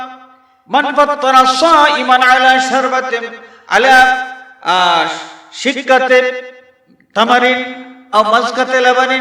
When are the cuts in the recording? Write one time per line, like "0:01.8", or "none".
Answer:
0:08.0